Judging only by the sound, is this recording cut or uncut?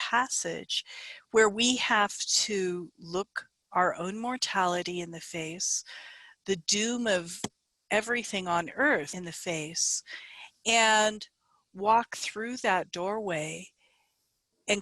cut